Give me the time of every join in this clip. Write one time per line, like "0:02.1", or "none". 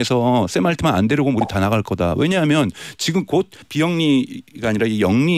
0:03.6